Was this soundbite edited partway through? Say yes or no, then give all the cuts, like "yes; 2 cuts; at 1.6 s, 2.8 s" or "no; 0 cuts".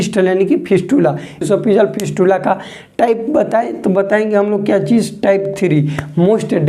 yes; 1 cut; at 1.4 s